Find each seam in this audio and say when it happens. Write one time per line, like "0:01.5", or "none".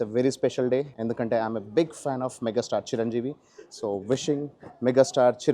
0:00.9